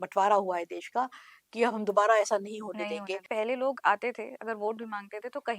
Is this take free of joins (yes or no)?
no